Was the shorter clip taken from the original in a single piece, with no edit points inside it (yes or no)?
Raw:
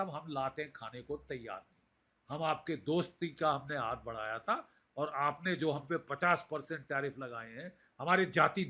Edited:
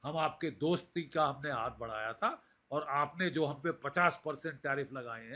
yes